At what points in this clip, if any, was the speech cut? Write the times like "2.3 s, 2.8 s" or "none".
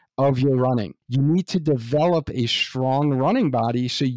1.0 s